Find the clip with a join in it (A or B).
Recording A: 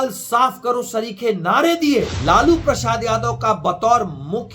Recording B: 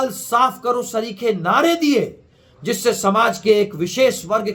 A